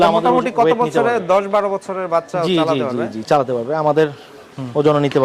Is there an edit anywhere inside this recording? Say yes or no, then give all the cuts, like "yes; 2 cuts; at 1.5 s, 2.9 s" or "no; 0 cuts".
no; 0 cuts